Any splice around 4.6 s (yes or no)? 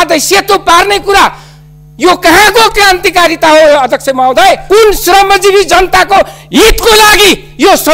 yes